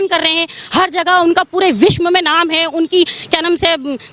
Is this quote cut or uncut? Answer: uncut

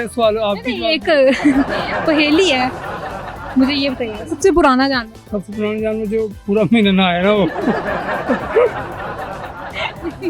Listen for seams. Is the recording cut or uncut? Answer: cut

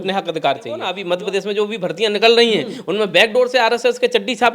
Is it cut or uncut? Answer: cut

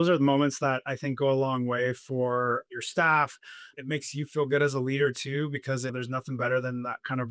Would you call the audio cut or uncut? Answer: uncut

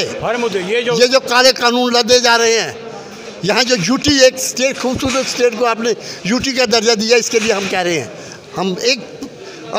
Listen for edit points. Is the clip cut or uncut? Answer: uncut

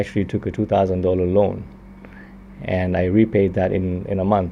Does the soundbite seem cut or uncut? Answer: uncut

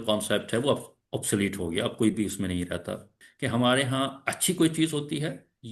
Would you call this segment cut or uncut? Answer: cut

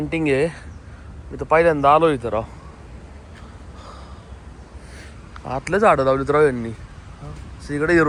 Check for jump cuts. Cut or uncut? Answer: uncut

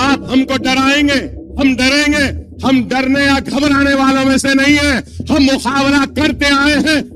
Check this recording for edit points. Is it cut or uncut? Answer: cut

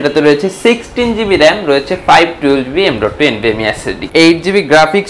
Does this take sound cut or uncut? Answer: cut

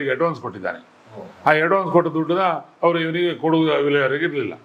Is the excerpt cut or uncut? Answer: uncut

